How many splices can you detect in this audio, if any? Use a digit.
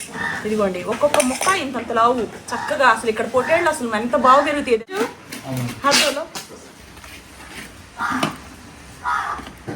1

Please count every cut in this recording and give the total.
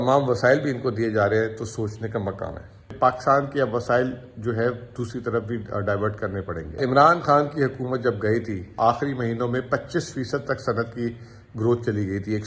3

